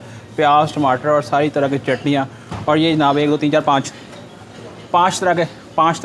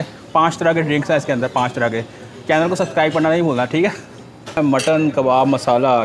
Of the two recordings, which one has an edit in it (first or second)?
second